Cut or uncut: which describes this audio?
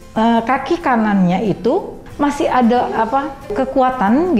cut